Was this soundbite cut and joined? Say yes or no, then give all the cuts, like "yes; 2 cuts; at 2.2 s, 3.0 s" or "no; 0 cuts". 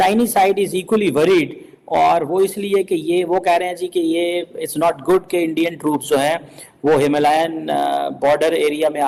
no; 0 cuts